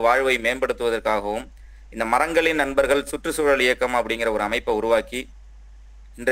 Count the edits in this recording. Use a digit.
0